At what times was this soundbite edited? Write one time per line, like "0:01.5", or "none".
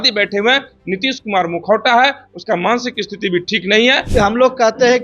0:04.0